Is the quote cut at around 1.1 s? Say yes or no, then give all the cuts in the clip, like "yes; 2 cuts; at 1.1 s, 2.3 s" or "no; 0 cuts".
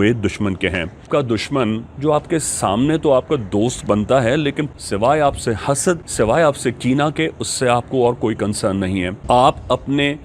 yes; 4 cuts; at 1.1 s, 4.7 s, 6.1 s, 9.1 s